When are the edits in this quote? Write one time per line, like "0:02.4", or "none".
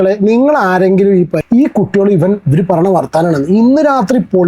0:01.4

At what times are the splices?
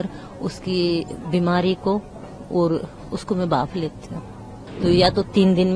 0:04.6

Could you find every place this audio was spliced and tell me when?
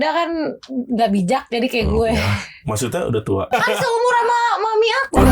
0:03.5

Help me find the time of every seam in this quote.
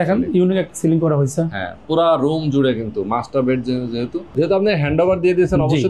0:04.3

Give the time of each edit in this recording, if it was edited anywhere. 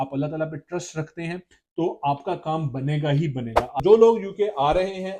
0:03.8

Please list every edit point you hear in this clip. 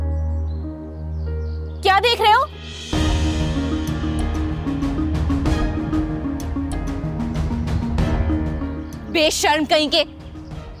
none

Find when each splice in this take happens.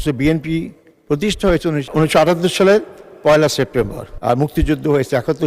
0:01.9
0:04.1

